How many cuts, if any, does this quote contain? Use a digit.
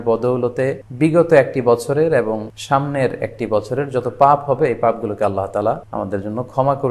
3